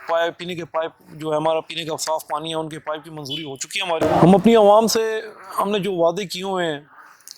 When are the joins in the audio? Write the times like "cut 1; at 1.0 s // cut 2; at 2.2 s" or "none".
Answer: cut 1; at 4.0 s